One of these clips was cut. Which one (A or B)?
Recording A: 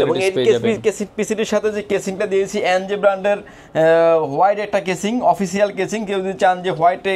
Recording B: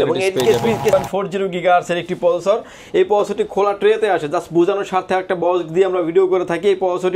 B